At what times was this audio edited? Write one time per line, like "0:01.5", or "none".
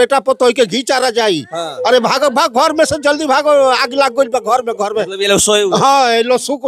none